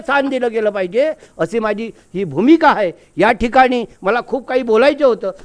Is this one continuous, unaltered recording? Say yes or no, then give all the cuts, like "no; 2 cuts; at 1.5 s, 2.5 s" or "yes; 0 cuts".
yes; 0 cuts